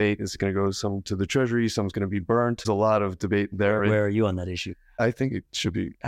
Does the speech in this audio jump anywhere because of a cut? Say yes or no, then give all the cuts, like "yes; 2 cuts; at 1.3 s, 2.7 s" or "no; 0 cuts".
yes; 1 cut; at 2.6 s